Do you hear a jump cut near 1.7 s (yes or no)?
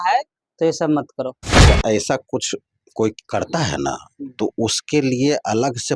yes